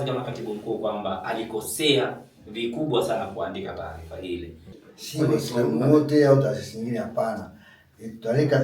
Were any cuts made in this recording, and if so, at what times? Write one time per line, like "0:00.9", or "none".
0:04.7